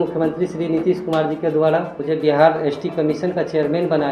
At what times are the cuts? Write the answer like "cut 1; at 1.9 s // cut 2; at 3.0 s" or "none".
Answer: cut 1; at 1.9 s